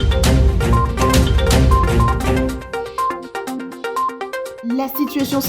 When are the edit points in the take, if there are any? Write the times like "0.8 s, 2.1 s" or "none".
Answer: 1.2 s, 4.5 s